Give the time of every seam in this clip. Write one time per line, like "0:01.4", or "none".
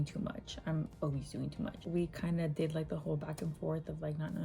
0:01.8